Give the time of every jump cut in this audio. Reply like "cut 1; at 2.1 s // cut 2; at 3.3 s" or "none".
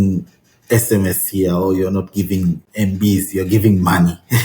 cut 1; at 2.7 s